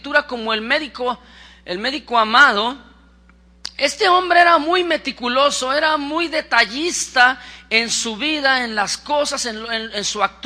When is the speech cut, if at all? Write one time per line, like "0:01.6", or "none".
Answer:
0:01.7

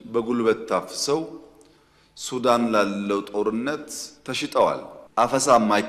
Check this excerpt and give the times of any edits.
0:04.9

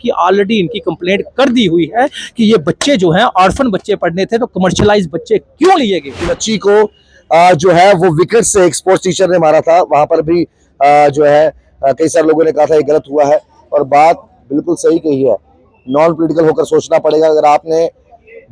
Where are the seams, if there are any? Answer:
0:06.3

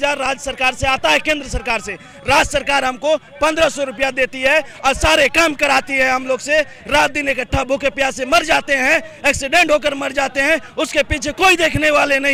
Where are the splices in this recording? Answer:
none

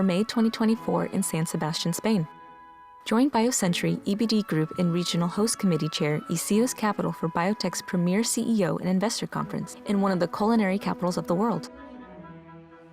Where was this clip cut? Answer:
0:11.6

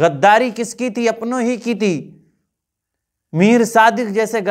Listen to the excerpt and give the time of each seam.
none

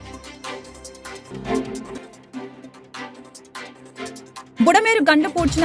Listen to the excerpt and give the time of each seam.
0:01.3
0:04.5

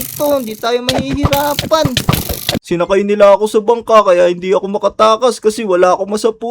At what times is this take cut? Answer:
0:02.6

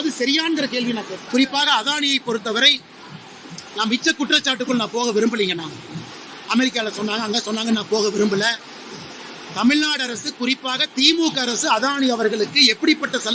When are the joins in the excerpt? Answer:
0:01.2

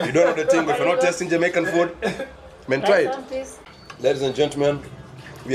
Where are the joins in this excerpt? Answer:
0:03.6

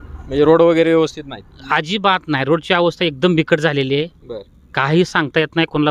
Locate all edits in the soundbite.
none

